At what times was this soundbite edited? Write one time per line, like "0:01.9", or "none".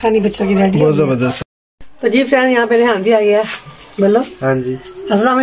0:01.4